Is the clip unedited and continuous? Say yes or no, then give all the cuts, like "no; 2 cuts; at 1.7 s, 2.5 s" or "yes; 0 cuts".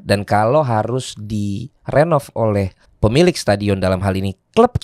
no; 1 cut; at 2.8 s